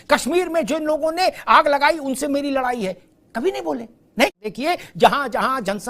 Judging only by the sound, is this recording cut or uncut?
cut